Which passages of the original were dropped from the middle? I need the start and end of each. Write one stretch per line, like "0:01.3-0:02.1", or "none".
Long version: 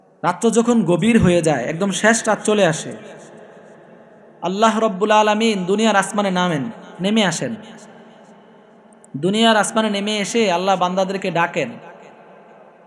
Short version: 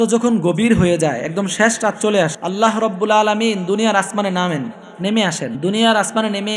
0:02.8-0:04.4
0:07.6-0:09.2